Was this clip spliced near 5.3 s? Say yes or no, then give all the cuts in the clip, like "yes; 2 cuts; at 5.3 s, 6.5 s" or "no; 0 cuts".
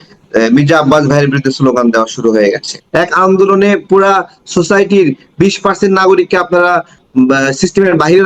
no; 1 cut; at 2.7 s